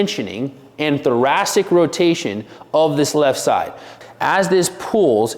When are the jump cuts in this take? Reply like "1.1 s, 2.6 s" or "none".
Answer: 3.9 s